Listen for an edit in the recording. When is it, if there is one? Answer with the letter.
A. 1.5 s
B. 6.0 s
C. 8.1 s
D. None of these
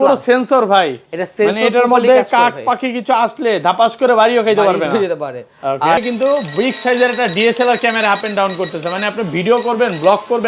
B